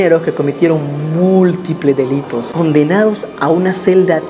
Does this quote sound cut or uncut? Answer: uncut